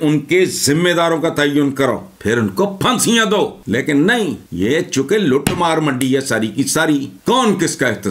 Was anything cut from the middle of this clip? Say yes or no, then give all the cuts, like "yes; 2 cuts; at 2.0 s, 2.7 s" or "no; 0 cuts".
yes; 4 cuts; at 2.1 s, 3.6 s, 4.4 s, 7.1 s